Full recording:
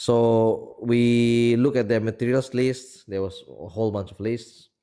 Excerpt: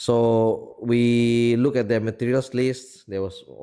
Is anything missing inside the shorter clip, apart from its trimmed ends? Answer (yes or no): no